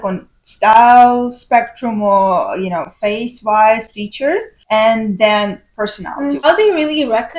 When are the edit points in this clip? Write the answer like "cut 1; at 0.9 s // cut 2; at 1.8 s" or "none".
cut 1; at 6.4 s